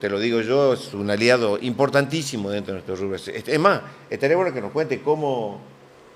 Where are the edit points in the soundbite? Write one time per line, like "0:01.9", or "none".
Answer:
none